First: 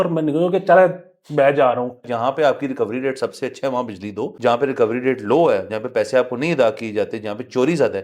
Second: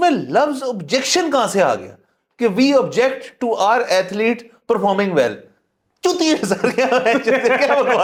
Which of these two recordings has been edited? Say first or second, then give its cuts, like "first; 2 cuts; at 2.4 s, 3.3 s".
first; 2 cuts; at 2.0 s, 4.3 s